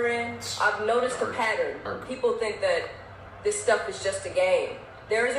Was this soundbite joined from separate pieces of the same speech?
yes; 1 cut; at 1.8 s

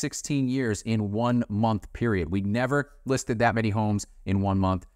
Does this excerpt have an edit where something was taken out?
no; 0 cuts

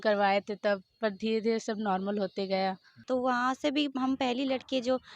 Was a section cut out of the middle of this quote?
yes; 1 cut; at 2.9 s

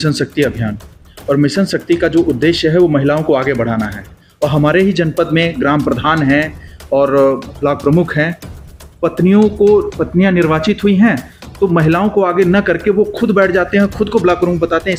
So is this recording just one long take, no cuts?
yes; 0 cuts

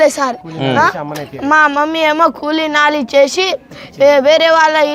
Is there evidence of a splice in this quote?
no; 0 cuts

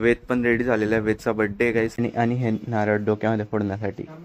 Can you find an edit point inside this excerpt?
yes; 1 cut; at 1.9 s

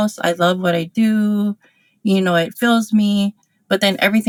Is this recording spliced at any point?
no; 0 cuts

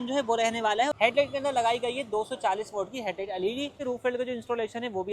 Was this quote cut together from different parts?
yes; 2 cuts; at 0.9 s, 3.8 s

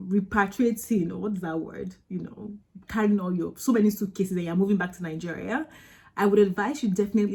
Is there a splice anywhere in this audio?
no; 0 cuts

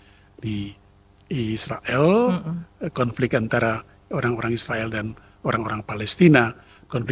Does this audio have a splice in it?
no; 0 cuts

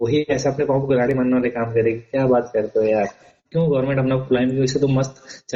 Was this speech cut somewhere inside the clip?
no; 0 cuts

